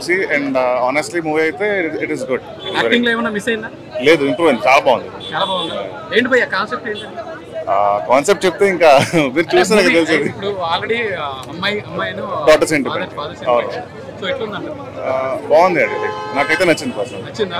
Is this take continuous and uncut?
yes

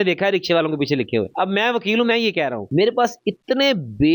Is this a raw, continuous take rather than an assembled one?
yes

